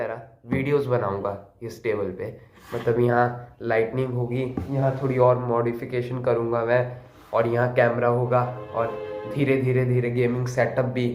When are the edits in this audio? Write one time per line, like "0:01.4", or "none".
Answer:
none